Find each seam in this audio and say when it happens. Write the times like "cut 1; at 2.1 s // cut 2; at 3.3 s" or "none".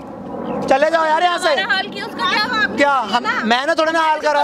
none